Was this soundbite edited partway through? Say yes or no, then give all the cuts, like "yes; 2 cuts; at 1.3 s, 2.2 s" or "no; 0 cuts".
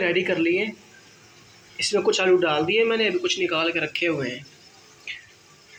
no; 0 cuts